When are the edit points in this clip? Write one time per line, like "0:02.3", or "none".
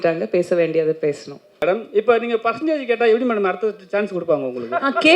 0:01.6